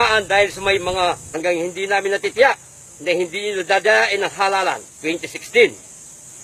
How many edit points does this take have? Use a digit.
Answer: 0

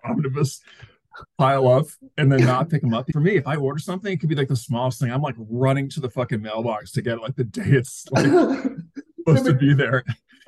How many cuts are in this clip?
1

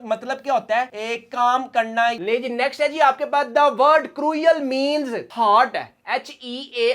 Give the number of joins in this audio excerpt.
2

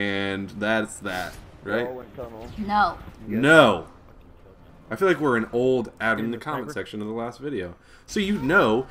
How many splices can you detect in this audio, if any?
0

